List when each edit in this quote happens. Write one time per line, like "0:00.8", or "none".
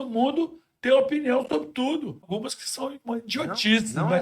0:02.2